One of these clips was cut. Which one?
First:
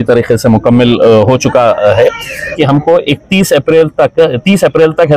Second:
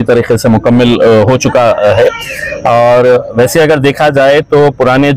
first; 1 cut; at 2.5 s

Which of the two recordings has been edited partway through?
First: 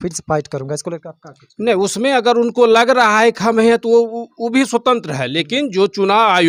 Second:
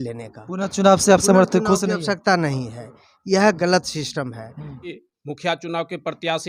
second; 1 cut; at 4.9 s

